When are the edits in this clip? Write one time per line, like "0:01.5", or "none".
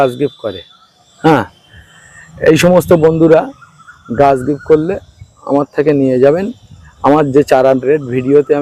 none